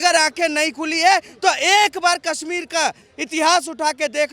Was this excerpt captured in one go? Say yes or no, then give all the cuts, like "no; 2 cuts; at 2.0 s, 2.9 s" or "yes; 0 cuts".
yes; 0 cuts